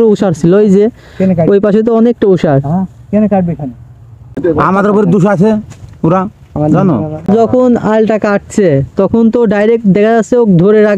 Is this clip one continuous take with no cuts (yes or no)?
no